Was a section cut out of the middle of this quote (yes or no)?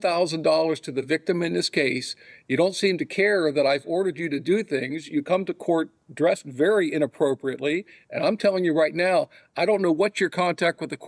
no